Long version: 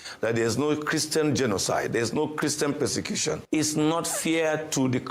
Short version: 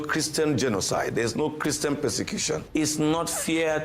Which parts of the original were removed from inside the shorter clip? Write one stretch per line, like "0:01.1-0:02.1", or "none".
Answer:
none